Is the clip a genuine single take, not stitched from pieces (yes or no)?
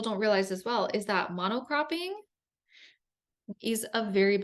no